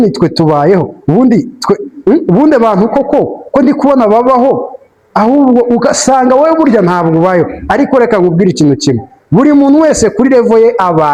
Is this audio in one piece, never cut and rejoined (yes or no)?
yes